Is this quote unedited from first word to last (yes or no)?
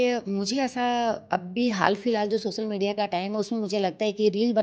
yes